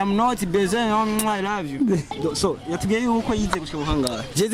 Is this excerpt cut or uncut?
cut